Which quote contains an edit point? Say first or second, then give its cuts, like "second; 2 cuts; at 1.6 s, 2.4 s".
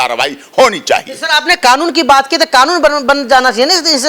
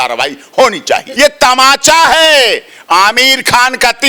second; 1 cut; at 1.1 s